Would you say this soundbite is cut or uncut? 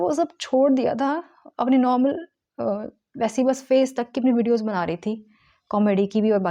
uncut